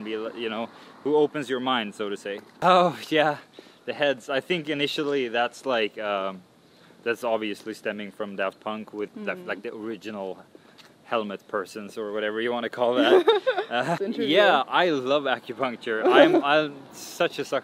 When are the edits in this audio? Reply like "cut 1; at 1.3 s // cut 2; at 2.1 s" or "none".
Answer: cut 1; at 2.5 s // cut 2; at 14.1 s